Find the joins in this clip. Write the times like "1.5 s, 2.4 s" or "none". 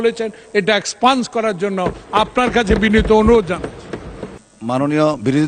none